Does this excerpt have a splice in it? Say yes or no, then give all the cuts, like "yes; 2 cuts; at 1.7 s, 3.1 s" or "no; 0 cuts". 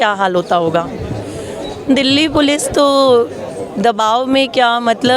yes; 1 cut; at 1.0 s